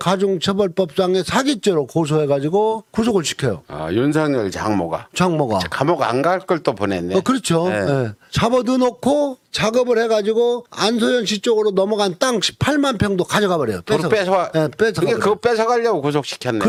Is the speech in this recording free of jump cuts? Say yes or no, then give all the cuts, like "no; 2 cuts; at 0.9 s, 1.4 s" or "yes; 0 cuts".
yes; 0 cuts